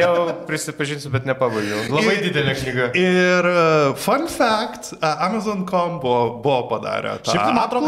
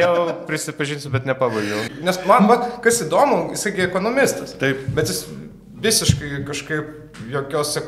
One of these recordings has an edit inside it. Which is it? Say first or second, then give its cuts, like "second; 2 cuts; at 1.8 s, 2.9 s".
second; 1 cut; at 1.9 s